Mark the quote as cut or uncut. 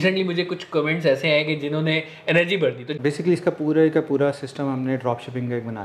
cut